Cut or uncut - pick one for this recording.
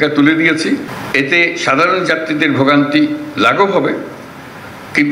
cut